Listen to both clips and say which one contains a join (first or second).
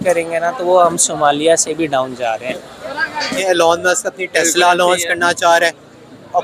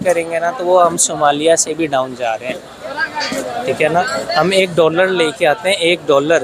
first